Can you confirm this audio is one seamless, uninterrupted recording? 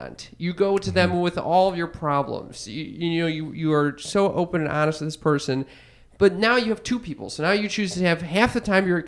yes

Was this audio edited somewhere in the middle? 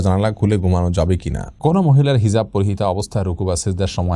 yes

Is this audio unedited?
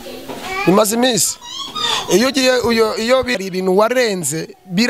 no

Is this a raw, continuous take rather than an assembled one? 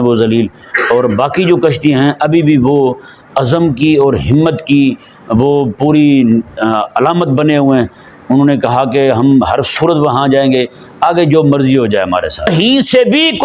no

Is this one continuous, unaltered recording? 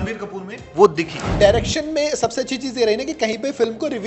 no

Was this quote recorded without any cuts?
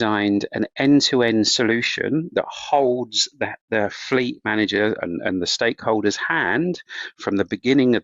yes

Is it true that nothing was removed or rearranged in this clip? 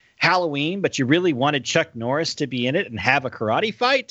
yes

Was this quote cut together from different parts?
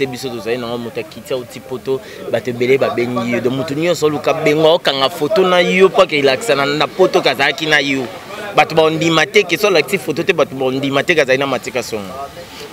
no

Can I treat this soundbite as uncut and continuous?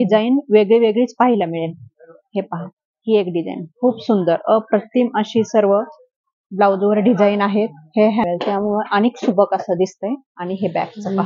no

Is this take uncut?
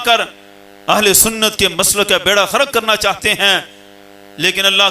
yes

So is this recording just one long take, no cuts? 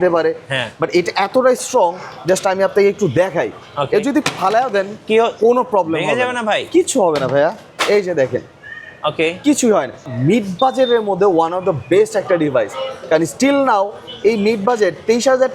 no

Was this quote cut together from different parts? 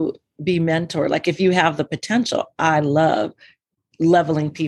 no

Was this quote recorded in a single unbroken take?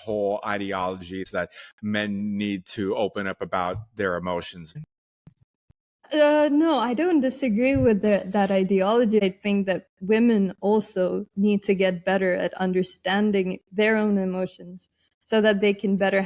no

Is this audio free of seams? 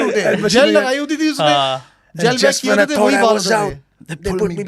yes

